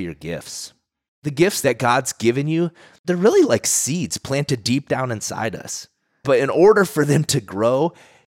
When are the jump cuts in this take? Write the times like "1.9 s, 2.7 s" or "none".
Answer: 1.4 s, 2.9 s